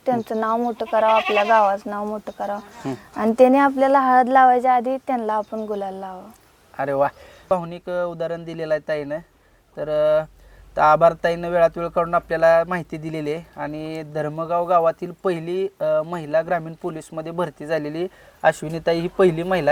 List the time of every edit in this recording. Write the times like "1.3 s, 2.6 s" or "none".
none